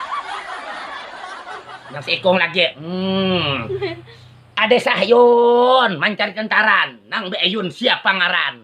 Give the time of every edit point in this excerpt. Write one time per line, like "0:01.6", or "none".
0:01.0
0:01.8